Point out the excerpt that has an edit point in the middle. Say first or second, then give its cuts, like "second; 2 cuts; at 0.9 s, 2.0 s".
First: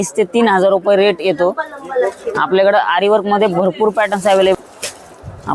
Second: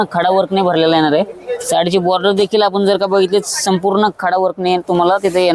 first; 1 cut; at 4.5 s